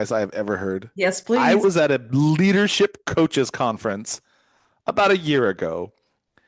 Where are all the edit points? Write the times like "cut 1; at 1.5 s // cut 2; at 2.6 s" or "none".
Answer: cut 1; at 1.6 s

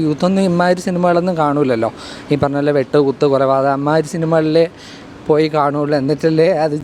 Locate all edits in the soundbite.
none

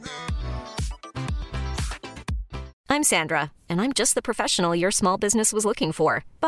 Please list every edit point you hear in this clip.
cut 1; at 2.7 s

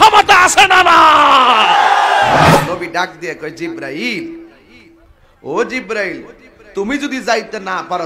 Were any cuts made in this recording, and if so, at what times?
cut 1; at 2.5 s

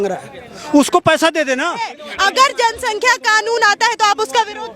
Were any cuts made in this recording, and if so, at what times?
cut 1; at 2.0 s

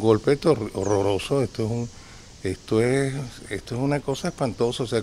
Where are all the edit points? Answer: none

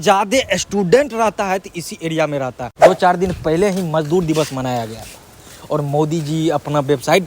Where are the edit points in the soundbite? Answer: cut 1; at 2.7 s

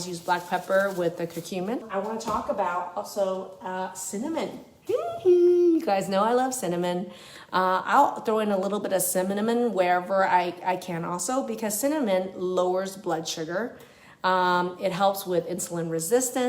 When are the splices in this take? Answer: cut 1; at 1.9 s

